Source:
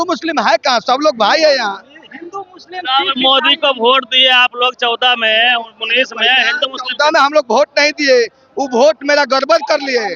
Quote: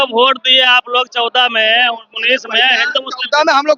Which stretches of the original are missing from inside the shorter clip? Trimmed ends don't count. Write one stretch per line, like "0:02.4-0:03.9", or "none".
none